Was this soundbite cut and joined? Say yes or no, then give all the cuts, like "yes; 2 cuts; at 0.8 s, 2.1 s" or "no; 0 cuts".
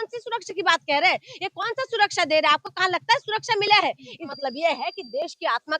yes; 1 cut; at 4.3 s